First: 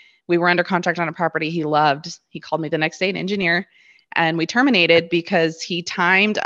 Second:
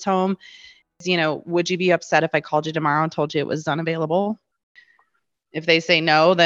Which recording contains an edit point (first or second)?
second